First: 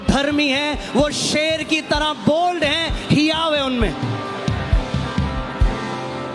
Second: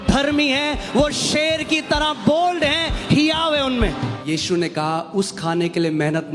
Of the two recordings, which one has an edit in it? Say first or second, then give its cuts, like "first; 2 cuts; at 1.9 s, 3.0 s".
second; 1 cut; at 4.1 s